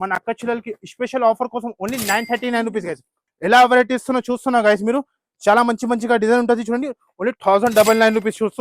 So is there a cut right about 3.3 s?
yes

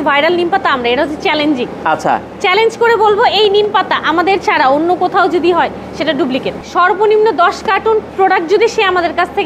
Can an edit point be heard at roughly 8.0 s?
no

